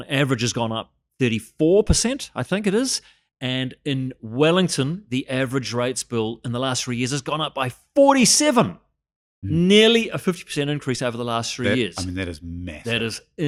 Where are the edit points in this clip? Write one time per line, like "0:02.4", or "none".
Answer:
none